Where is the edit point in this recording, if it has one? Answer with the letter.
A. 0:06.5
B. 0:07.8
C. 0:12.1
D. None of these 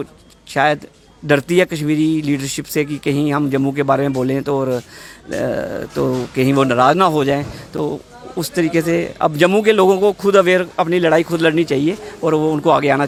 D